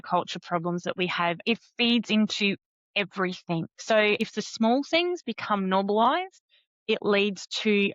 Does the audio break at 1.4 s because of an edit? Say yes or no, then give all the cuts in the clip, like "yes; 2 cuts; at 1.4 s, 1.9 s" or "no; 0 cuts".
yes; 2 cuts; at 1.4 s, 4.2 s